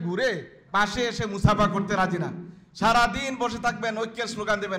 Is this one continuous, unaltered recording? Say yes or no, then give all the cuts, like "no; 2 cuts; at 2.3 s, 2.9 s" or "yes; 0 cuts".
yes; 0 cuts